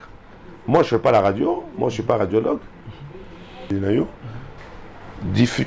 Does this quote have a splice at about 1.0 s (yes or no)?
no